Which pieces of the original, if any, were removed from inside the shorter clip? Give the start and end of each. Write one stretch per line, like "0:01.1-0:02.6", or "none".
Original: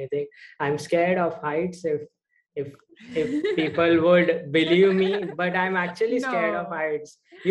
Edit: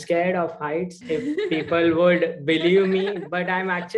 0:01.7-0:03.0